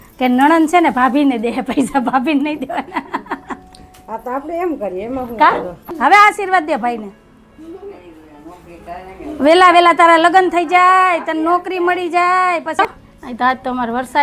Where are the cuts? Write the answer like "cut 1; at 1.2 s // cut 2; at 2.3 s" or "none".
cut 1; at 5.8 s // cut 2; at 12.8 s